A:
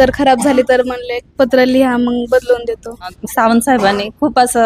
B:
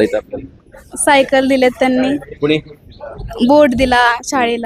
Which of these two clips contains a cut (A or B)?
A